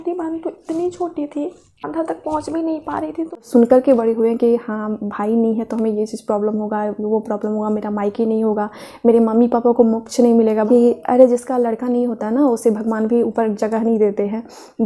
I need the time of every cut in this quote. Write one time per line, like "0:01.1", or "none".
0:01.7
0:03.4
0:10.8